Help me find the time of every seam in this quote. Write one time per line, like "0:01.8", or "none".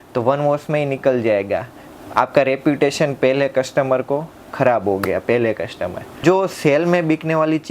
0:06.2